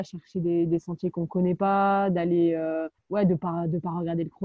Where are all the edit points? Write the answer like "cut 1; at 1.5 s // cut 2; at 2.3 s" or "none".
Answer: cut 1; at 3.0 s